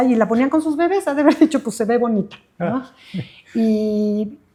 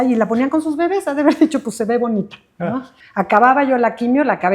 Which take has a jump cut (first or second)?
second